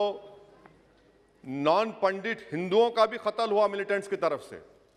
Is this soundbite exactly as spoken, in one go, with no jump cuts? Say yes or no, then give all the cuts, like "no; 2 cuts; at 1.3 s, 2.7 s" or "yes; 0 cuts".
yes; 0 cuts